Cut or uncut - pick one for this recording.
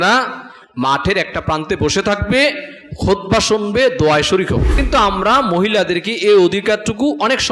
cut